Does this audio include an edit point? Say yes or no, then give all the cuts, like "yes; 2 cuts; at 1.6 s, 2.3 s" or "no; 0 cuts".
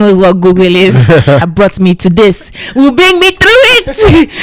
yes; 1 cut; at 1.4 s